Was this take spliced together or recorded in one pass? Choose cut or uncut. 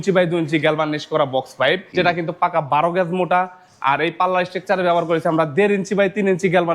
cut